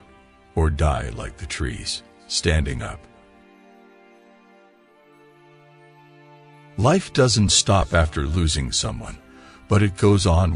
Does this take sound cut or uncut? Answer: cut